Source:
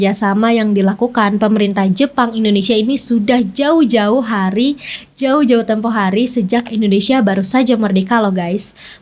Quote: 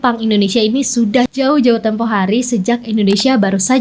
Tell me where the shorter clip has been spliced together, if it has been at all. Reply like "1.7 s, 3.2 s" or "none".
1.3 s